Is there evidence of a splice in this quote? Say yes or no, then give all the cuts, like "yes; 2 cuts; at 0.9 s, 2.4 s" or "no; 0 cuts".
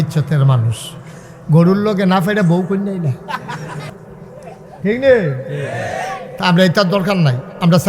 yes; 1 cut; at 4.0 s